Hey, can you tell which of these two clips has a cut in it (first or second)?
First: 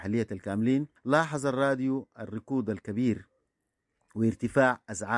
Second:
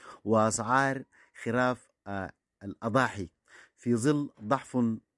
first